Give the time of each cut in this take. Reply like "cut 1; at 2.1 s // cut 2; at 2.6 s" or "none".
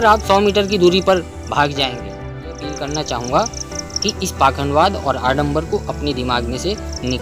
cut 1; at 2.6 s